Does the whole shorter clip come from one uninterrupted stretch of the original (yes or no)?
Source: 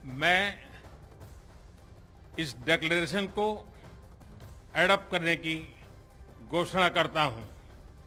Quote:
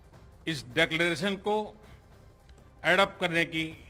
yes